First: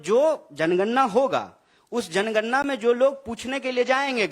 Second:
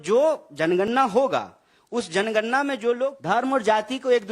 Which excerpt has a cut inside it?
second; 1 cut; at 3.2 s

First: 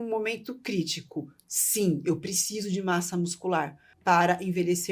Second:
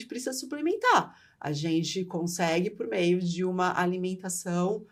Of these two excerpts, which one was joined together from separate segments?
first; 1 cut; at 3.8 s

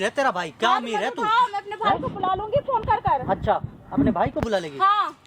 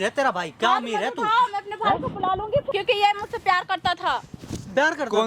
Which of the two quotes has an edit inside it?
second; 1 cut; at 2.7 s

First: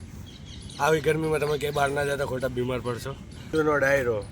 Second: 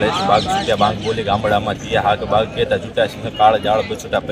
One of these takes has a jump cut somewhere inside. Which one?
first; 1 cut; at 3.3 s

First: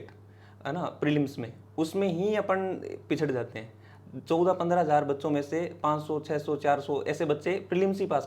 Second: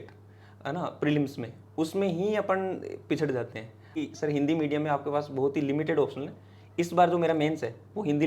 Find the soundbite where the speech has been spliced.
second; 1 cut; at 4.0 s

